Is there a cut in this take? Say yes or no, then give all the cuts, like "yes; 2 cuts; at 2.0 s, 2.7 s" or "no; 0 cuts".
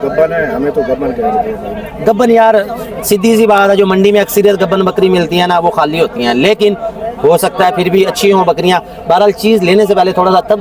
no; 0 cuts